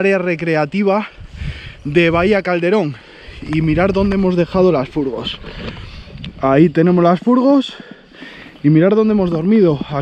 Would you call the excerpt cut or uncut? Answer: uncut